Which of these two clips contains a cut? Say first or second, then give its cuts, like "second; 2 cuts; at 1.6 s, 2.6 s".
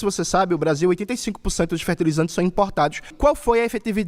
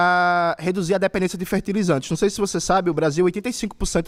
first; 1 cut; at 3.1 s